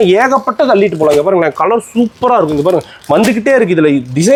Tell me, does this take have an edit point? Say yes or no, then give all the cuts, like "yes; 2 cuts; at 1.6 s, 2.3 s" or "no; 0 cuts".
no; 0 cuts